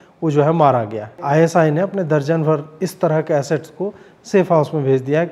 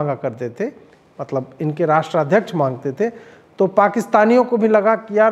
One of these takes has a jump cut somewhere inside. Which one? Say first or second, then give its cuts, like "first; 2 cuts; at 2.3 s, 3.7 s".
first; 1 cut; at 1.2 s